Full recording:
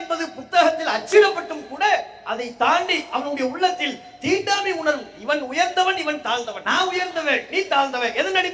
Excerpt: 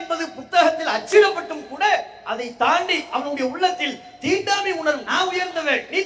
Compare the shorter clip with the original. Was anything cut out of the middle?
yes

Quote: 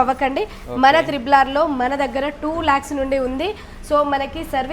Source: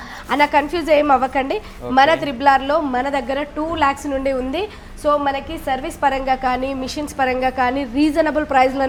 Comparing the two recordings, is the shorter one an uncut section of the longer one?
yes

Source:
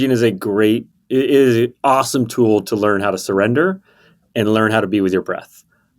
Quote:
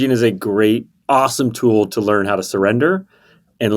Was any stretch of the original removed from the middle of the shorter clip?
yes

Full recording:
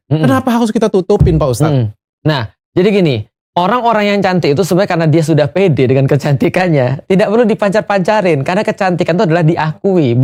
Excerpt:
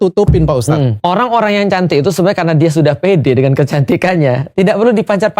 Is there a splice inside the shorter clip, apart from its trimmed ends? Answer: yes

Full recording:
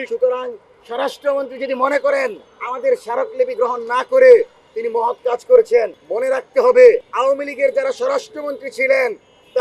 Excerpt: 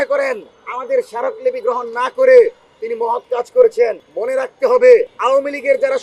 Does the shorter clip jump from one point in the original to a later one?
no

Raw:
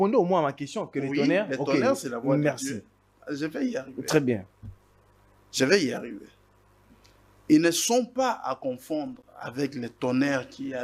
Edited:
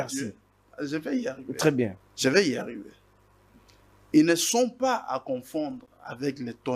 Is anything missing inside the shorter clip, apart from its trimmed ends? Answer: yes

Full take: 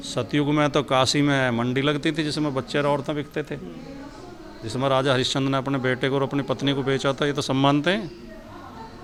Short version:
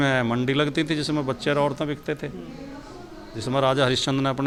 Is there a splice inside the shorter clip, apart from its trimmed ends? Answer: no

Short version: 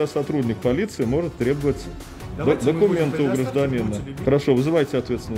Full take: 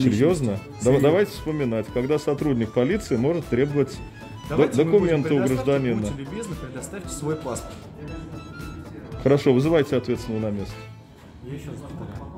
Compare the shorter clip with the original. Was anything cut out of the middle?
yes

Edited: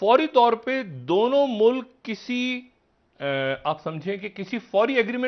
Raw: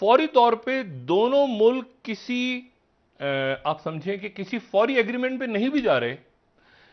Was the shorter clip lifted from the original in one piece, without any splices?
yes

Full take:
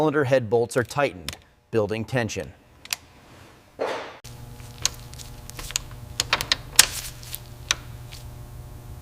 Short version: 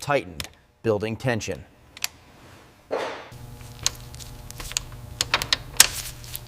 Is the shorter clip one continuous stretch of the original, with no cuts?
no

